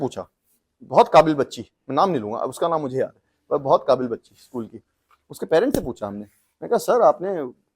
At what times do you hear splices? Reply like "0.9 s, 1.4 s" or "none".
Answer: none